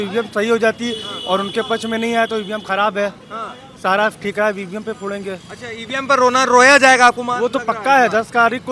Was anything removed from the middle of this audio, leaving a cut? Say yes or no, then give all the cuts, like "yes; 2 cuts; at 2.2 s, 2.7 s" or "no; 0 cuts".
no; 0 cuts